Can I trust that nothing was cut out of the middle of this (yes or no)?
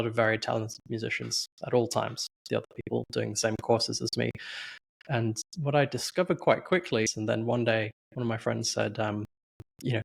no